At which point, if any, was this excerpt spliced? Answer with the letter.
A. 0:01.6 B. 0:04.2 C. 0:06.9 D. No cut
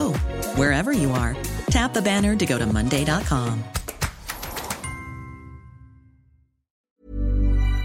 C